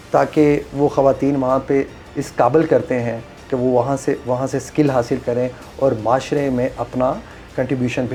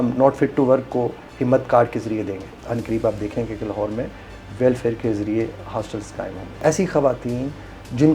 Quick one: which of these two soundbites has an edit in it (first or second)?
second